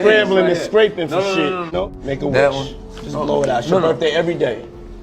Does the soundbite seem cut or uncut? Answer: cut